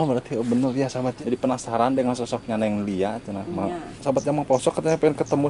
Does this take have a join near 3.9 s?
yes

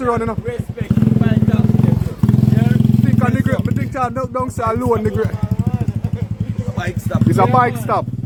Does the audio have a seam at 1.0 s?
no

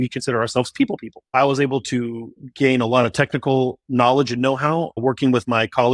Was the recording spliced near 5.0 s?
yes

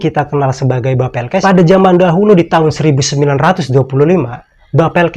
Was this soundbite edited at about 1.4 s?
yes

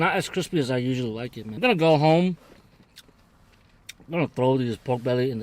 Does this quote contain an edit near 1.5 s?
yes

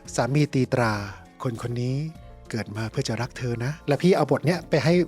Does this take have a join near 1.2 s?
no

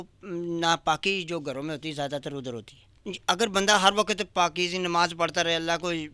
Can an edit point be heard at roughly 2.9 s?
yes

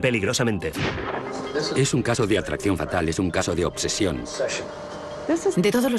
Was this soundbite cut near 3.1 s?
yes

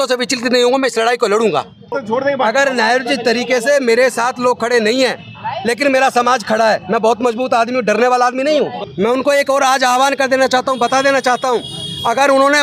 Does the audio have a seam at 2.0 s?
yes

